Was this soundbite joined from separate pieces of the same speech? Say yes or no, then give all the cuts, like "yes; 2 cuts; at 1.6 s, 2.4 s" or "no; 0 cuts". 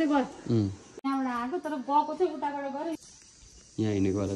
yes; 1 cut; at 0.9 s